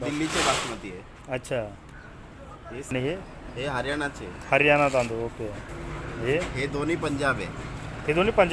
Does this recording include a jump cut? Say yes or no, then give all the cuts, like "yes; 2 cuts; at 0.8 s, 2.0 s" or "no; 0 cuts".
yes; 2 cuts; at 2.9 s, 5.7 s